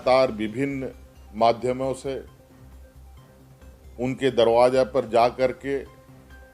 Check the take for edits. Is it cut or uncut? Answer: cut